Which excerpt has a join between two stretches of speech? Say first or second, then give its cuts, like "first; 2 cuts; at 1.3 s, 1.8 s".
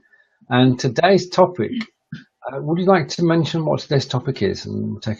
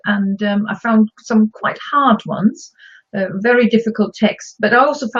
first; 1 cut; at 3.6 s